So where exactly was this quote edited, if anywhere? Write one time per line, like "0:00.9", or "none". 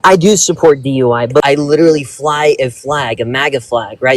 0:01.4

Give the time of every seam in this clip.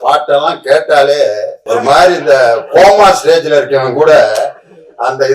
0:01.5

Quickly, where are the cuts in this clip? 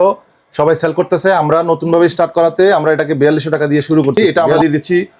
0:04.1

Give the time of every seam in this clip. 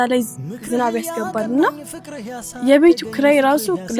none

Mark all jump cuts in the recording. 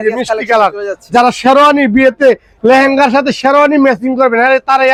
none

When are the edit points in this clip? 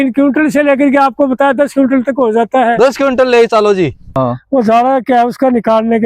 0:04.1

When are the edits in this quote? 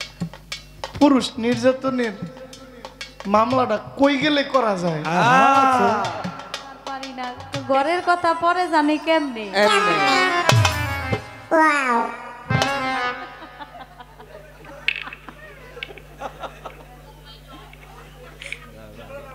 0:07.2

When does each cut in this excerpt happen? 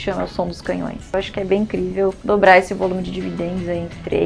0:01.1

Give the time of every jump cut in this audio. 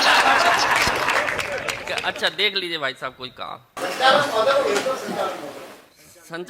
0:01.8

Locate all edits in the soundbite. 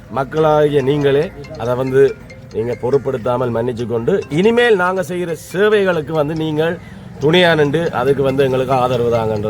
none

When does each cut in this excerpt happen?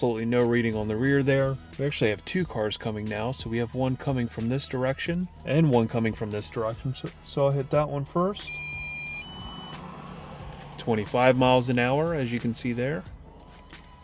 0:01.6
0:05.4

